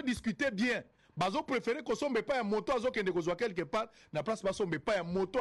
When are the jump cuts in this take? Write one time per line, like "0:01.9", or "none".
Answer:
none